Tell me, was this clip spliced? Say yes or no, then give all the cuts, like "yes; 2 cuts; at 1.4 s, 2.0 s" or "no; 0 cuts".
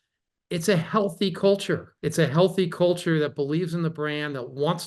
yes; 1 cut; at 1.9 s